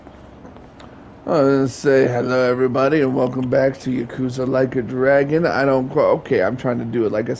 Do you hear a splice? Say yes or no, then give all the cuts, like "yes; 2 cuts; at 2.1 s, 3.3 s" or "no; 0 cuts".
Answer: no; 0 cuts